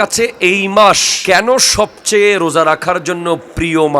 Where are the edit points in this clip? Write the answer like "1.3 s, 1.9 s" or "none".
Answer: 1.1 s